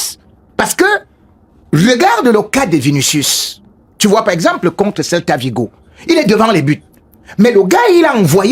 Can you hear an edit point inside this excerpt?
no; 0 cuts

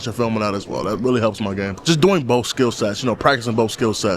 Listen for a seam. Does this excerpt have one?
yes; 1 cut; at 1.7 s

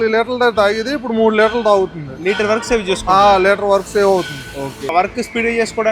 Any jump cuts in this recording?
yes; 1 cut; at 4.9 s

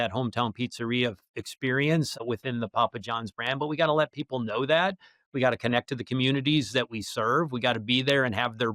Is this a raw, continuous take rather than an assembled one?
no; 1 cut; at 2.2 s

